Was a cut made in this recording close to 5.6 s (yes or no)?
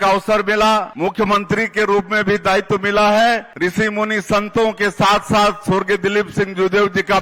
no